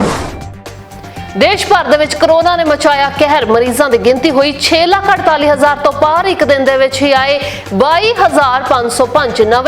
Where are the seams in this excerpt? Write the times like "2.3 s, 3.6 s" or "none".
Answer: 0.9 s